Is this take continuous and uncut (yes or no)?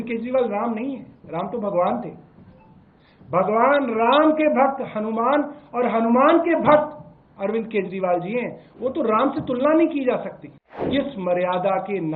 no